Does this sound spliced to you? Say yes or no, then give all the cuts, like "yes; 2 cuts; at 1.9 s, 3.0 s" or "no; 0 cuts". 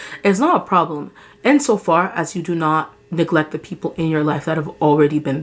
no; 0 cuts